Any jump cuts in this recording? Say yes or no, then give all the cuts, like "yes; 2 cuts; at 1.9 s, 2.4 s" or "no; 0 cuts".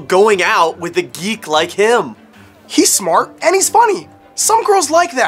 no; 0 cuts